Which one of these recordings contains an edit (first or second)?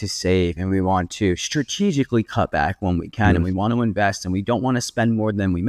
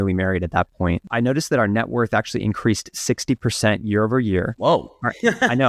second